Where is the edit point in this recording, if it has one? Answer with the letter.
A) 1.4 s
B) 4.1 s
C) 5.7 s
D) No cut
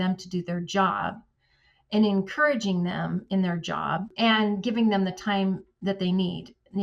B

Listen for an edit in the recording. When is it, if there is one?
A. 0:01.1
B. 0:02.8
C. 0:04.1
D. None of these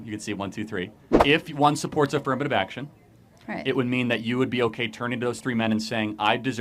A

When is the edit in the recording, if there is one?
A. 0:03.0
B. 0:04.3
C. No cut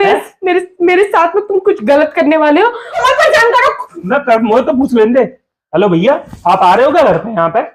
A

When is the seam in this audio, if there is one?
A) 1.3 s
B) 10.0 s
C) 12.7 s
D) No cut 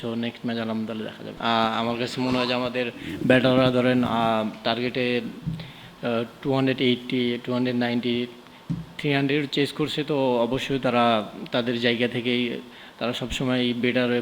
A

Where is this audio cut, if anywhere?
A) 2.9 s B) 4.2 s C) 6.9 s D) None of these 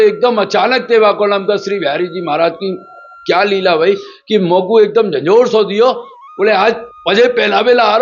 C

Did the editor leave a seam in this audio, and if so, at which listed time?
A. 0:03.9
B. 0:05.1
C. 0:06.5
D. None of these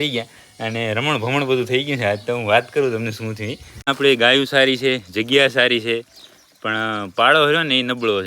A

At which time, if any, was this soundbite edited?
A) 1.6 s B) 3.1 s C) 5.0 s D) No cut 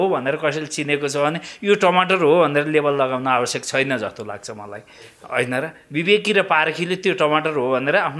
D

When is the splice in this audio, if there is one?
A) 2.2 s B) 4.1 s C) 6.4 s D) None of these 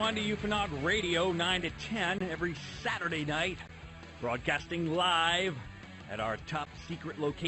B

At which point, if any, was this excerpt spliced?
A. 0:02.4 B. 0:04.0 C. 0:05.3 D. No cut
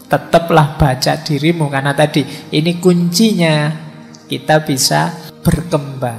C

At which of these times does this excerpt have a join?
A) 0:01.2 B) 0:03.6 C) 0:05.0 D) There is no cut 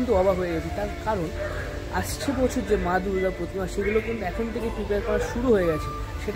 D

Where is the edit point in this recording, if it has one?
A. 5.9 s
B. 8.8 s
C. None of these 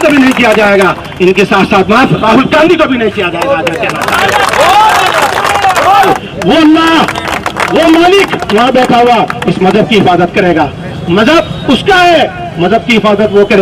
A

